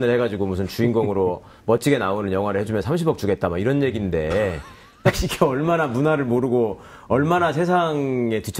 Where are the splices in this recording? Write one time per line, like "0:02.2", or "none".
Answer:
0:01.8